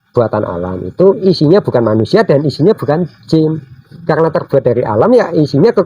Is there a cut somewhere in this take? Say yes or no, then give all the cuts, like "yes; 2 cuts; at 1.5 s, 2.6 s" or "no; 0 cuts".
no; 0 cuts